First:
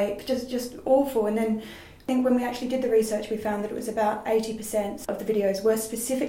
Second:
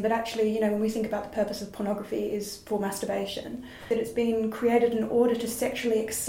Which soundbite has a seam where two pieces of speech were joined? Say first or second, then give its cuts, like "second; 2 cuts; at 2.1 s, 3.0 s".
first; 2 cuts; at 2.0 s, 5.0 s